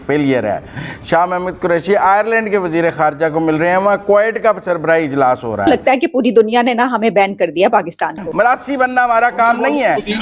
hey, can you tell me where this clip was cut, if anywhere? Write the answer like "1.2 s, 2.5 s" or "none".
5.7 s, 8.2 s

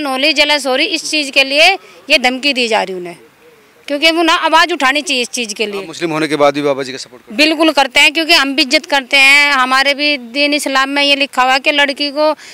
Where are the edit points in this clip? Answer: none

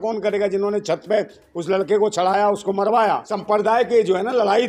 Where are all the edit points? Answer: 3.3 s

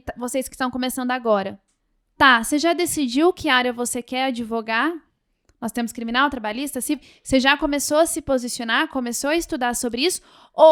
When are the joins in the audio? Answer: none

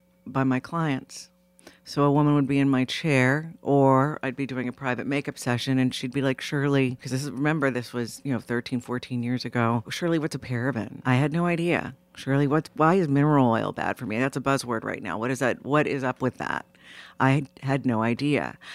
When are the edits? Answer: 7.0 s, 9.9 s, 10.9 s

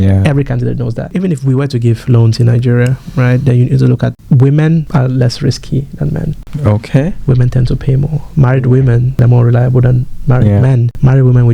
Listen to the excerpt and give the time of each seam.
1.0 s, 4.9 s, 6.4 s, 9.2 s

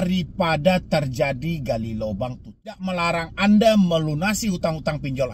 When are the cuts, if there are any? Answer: 2.9 s

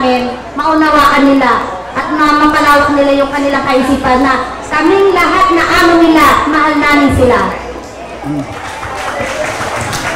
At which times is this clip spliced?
none

